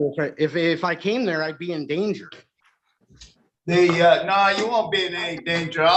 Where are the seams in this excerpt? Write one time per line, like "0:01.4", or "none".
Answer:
none